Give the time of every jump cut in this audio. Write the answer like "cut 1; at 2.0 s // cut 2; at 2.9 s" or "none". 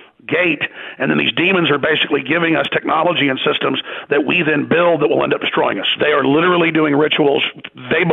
cut 1; at 5.9 s